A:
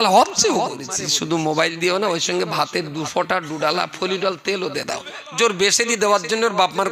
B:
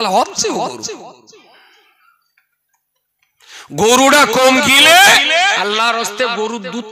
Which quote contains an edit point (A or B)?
A